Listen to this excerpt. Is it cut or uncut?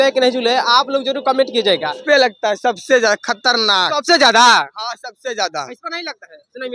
cut